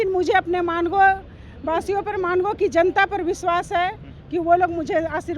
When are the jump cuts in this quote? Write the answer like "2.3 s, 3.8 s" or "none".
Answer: none